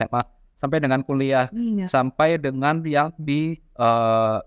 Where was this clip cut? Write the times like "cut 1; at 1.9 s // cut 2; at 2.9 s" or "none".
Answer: none